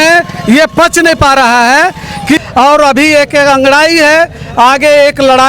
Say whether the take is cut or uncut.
cut